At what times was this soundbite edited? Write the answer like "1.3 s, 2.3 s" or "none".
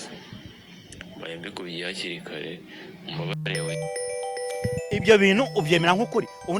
none